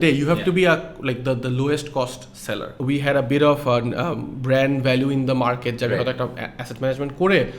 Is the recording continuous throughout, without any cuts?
no; 1 cut; at 2.7 s

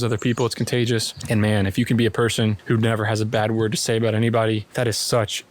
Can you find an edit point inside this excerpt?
yes; 3 cuts; at 1.1 s, 2.6 s, 4.7 s

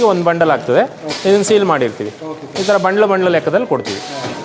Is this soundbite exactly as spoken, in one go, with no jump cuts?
yes; 0 cuts

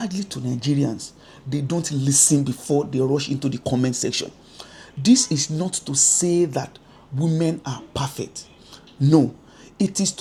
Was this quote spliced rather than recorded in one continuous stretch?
no; 0 cuts

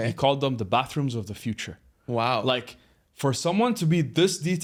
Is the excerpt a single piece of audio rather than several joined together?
yes; 0 cuts

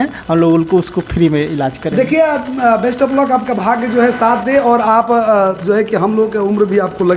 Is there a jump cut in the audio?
no; 0 cuts

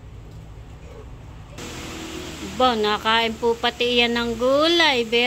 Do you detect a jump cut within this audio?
yes; 1 cut; at 1.6 s

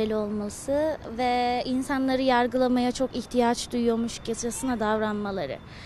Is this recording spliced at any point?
no; 0 cuts

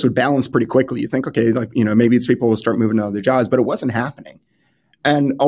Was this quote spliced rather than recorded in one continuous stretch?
no; 0 cuts

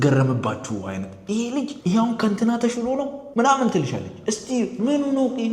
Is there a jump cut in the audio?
yes; 2 cuts; at 1.8 s, 3.2 s

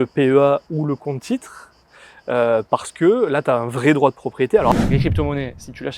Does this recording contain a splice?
yes; 1 cut; at 4.7 s

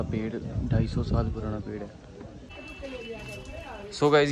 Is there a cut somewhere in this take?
yes; 1 cut; at 2.5 s

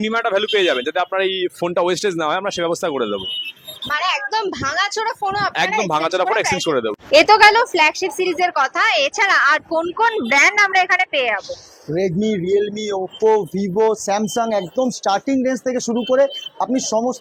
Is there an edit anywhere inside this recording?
no; 0 cuts

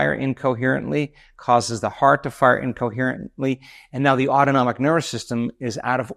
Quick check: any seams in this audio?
no; 0 cuts

